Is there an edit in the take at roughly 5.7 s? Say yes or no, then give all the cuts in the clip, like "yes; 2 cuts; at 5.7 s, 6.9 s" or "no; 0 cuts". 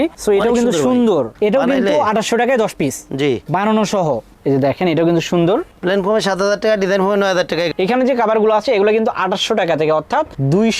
no; 2 cuts; at 4.3 s, 7.7 s